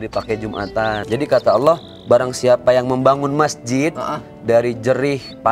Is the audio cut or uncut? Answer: cut